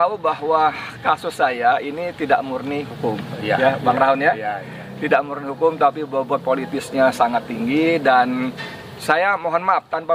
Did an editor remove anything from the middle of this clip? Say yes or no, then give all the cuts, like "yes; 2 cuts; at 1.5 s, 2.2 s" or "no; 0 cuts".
no; 0 cuts